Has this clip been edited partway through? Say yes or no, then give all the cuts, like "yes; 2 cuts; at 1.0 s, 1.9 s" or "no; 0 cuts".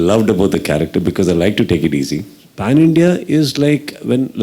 yes; 1 cut; at 2.5 s